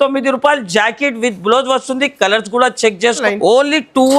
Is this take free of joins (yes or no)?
no